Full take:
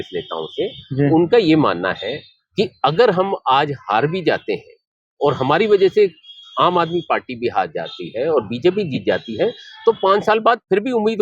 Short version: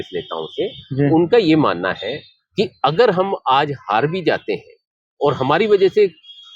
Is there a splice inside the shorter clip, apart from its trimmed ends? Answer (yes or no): no